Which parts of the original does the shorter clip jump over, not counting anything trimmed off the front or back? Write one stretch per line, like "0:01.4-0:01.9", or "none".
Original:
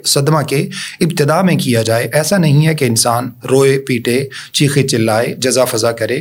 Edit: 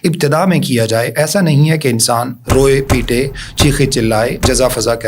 none